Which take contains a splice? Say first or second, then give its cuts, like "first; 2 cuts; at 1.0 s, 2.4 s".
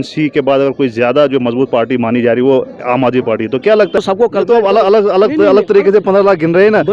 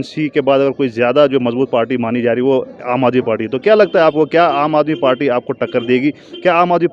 first; 1 cut; at 4.0 s